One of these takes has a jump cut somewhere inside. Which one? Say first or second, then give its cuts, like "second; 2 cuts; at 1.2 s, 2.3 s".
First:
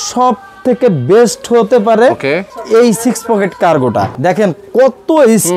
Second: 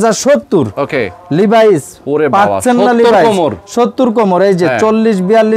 first; 2 cuts; at 2.5 s, 4.1 s